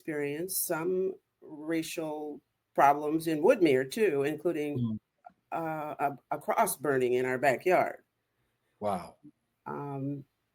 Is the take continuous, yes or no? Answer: yes